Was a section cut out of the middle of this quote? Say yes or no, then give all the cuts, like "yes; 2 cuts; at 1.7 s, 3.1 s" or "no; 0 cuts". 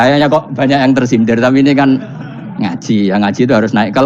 no; 0 cuts